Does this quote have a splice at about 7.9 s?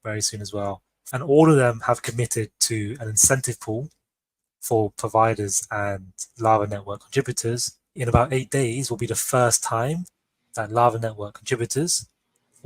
yes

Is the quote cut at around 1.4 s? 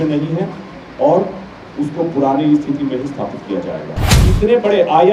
no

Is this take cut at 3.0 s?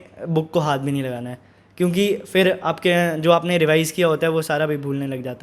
no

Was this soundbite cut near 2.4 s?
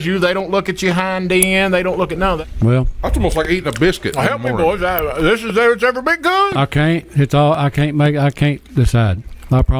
yes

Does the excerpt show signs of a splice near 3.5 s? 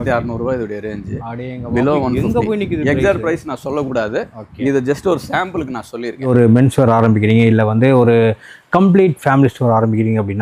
no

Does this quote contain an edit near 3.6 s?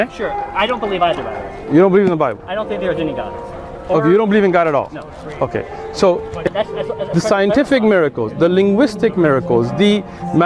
no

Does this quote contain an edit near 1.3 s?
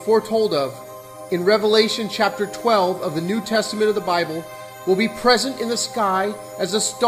no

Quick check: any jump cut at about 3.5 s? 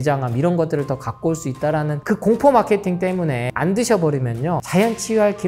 yes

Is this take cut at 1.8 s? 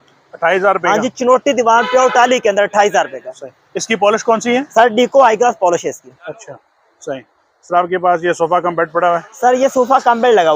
no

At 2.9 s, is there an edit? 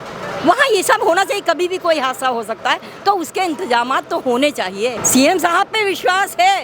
no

